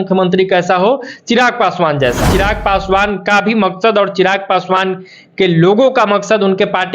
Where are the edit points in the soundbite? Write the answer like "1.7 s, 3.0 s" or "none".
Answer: 2.3 s